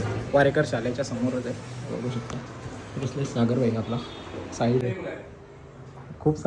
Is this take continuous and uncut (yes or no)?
no